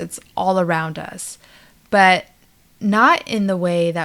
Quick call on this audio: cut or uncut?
uncut